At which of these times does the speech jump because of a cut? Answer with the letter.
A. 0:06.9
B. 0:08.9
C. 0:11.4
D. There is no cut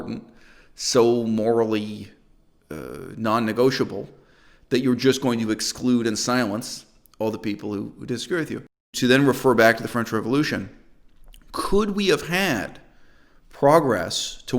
B